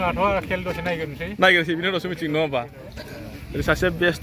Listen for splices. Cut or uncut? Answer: uncut